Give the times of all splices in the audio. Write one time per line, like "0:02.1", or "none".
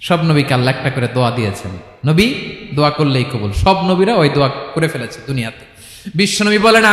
none

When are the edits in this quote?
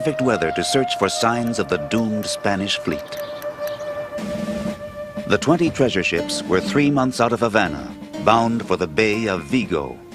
0:01.8

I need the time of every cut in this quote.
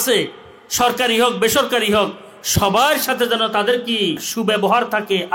0:04.3

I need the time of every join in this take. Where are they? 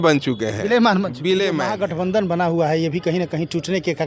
0:01.8

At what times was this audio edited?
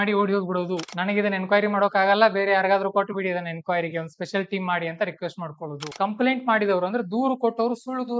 0:00.9
0:05.9

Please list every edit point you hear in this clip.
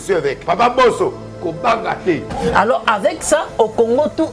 0:02.3

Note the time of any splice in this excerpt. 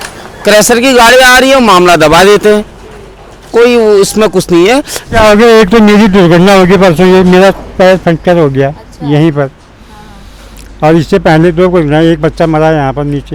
0:05.0

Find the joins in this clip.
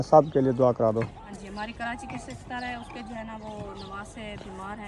0:01.2

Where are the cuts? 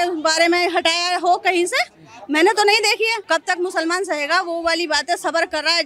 0:03.2

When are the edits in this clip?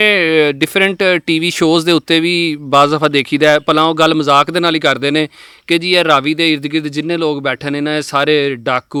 none

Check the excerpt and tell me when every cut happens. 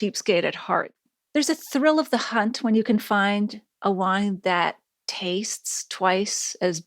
0:01.1

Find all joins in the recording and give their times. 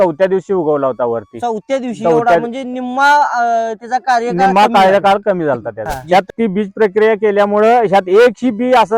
0:06.0

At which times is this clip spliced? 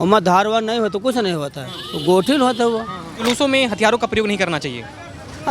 0:03.2

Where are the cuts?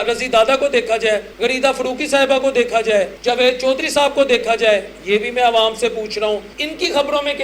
0:01.3
0:03.1
0:06.5

